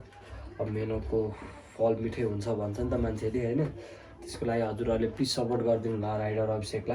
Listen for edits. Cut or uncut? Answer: uncut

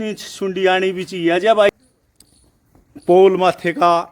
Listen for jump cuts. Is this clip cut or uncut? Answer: cut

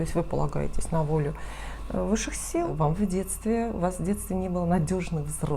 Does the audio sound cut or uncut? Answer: cut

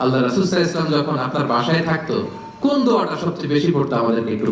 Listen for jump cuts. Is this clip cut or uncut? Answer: uncut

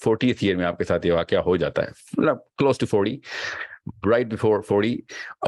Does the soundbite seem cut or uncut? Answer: uncut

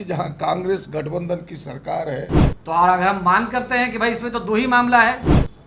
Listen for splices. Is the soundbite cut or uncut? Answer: cut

